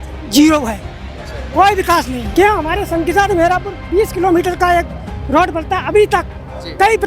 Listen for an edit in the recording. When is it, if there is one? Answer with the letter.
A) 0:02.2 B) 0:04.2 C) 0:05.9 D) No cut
A